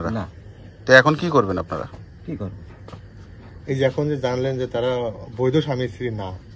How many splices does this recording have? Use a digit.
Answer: 0